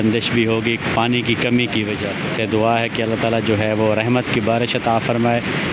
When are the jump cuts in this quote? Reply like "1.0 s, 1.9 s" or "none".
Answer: none